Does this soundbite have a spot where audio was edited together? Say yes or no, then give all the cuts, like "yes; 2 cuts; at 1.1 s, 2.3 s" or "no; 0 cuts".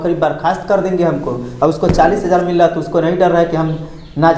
no; 0 cuts